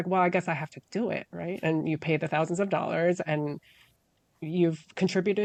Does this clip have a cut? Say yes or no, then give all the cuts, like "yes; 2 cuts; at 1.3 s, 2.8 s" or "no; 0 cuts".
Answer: no; 0 cuts